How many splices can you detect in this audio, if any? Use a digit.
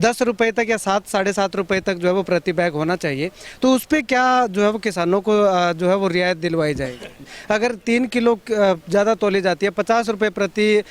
1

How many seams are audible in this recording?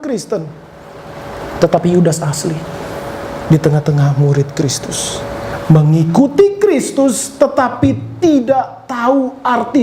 1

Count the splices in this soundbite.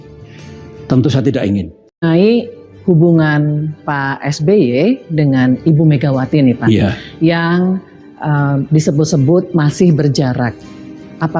1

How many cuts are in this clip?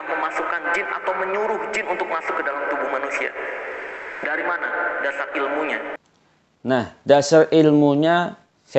0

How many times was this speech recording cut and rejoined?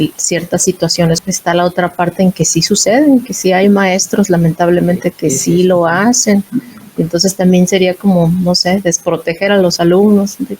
1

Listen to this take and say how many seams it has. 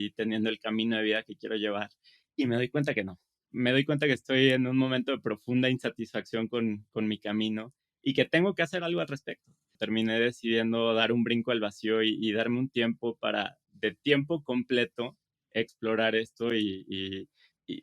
1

